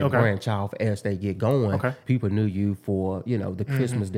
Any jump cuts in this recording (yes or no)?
yes